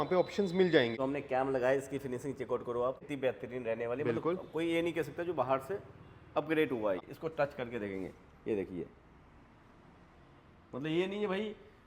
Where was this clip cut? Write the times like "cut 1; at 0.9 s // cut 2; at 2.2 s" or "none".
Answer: cut 1; at 0.9 s // cut 2; at 3.1 s // cut 3; at 7.0 s

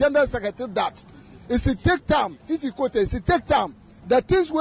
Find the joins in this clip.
none

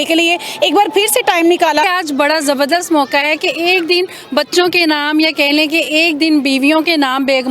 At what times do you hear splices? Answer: cut 1; at 1.8 s

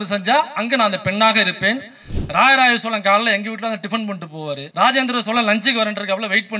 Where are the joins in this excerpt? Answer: cut 1; at 1.9 s // cut 2; at 4.7 s

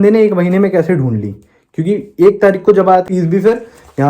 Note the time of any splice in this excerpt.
cut 1; at 3.1 s

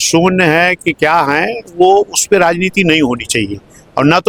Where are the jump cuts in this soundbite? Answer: none

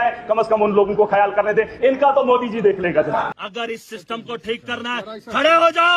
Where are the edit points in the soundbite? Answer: cut 1; at 3.3 s

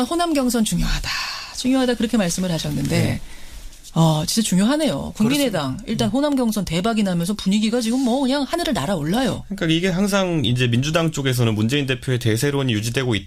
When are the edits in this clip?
none

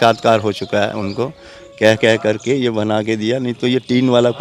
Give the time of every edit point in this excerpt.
cut 1; at 1.6 s

